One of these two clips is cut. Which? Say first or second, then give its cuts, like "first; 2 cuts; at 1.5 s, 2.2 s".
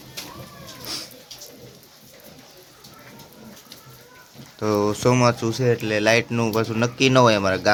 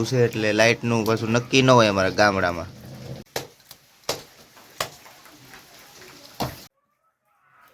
second; 2 cuts; at 3.3 s, 6.7 s